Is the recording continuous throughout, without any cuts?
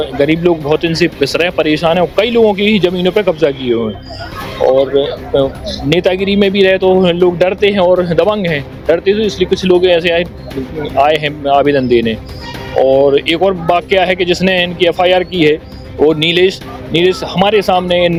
yes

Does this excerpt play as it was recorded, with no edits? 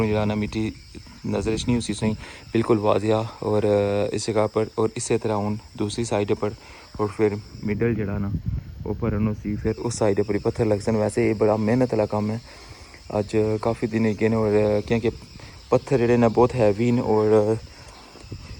yes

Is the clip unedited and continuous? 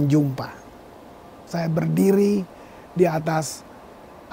no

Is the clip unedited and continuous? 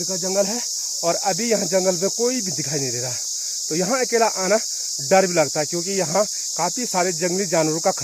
yes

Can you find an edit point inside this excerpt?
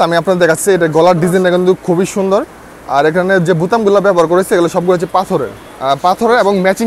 no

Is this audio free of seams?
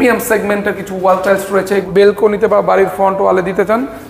no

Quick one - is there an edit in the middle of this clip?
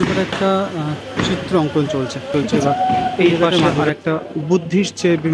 yes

